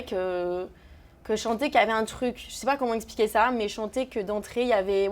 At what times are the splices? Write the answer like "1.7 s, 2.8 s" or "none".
none